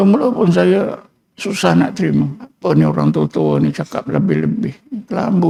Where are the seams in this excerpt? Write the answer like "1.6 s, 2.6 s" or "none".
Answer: none